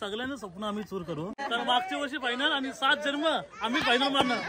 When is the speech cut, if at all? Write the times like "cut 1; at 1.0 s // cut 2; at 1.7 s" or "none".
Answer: cut 1; at 1.3 s